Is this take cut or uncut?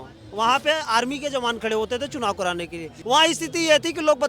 cut